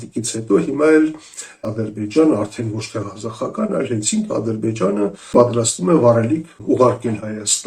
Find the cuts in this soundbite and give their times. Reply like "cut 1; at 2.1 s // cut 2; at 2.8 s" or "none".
cut 1; at 1.6 s // cut 2; at 5.3 s // cut 3; at 6.6 s